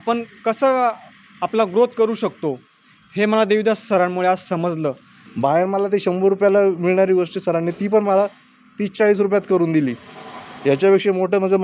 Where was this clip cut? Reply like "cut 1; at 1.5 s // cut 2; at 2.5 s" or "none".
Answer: cut 1; at 5.2 s